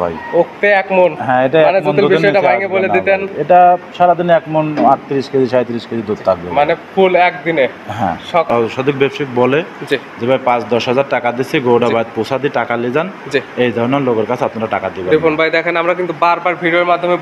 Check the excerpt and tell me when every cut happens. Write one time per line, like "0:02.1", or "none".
0:08.5